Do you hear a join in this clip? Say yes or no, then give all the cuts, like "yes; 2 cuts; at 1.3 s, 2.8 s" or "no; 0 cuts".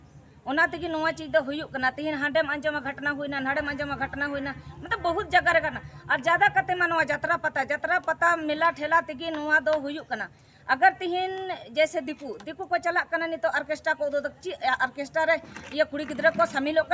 no; 0 cuts